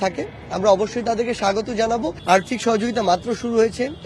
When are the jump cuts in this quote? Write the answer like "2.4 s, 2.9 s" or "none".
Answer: 2.2 s